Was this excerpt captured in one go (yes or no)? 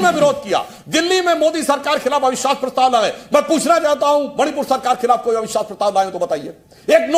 yes